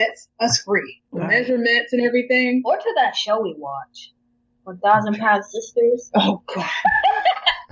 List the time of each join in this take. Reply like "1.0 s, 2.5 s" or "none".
1.0 s